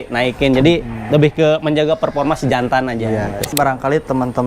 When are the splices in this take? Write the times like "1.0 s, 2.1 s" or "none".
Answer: 3.5 s